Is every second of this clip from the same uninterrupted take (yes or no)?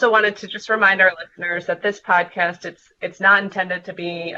yes